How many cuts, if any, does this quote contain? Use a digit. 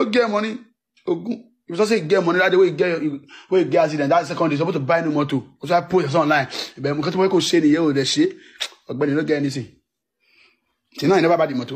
0